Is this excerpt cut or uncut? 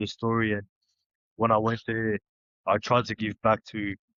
uncut